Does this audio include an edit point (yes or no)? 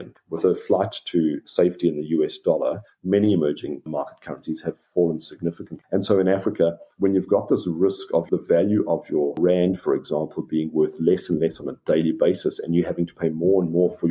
yes